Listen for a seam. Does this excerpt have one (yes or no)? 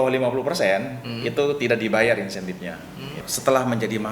yes